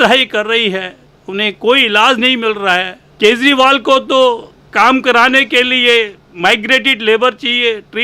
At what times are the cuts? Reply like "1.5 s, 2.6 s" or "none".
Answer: 3.0 s